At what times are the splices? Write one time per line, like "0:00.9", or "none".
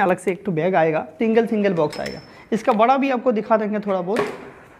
0:01.1